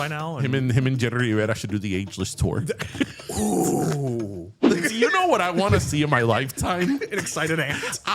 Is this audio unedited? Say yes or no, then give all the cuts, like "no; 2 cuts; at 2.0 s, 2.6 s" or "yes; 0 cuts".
no; 1 cut; at 4.7 s